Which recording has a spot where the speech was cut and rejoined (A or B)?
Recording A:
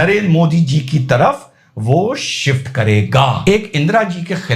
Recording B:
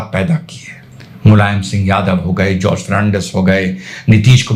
A